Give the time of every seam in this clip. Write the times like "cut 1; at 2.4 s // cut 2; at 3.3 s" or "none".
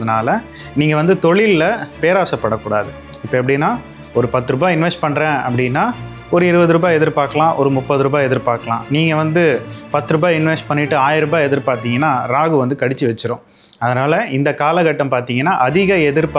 none